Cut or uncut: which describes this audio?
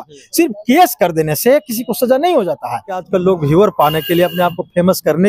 cut